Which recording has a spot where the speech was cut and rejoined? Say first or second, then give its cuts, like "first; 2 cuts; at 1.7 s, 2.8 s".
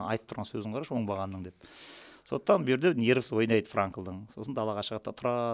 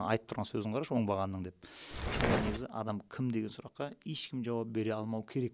second; 1 cut; at 2.2 s